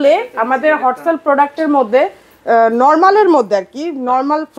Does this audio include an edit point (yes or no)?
no